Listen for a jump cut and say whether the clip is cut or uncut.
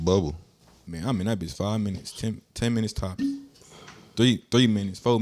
uncut